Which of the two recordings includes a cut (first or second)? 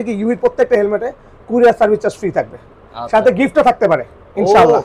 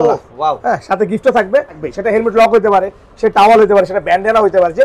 second